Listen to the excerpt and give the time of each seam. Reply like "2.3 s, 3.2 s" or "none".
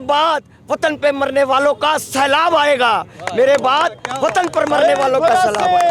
none